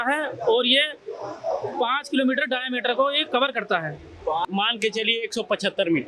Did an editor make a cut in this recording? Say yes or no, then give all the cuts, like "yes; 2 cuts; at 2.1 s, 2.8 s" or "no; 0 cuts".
yes; 1 cut; at 4.4 s